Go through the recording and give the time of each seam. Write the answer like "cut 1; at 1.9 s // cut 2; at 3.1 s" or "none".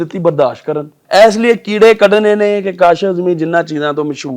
cut 1; at 1.0 s